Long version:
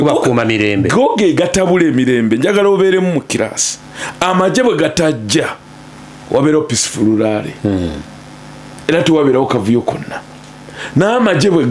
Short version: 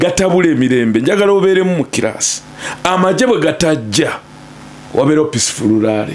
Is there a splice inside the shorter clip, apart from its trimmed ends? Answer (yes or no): no